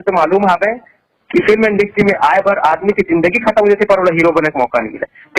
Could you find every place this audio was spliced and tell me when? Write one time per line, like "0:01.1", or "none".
none